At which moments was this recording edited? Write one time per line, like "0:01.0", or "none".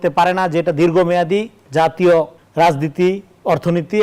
0:02.4